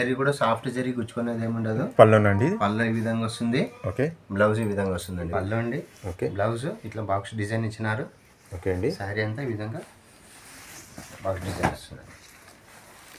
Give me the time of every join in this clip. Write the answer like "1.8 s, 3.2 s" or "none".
5.3 s